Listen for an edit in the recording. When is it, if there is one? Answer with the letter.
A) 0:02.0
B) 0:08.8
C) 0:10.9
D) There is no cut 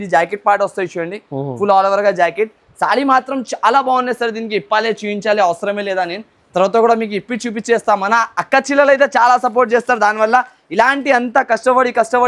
D